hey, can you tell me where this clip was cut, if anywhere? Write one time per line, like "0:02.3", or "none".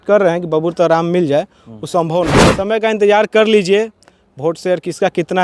0:02.4